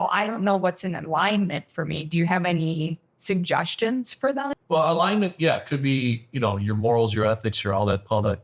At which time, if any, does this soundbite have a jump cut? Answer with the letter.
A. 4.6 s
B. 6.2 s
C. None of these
A